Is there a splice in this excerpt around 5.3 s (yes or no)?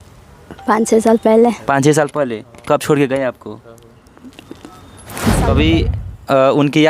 yes